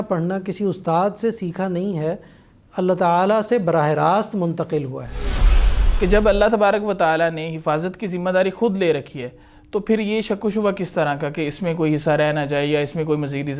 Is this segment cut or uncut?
cut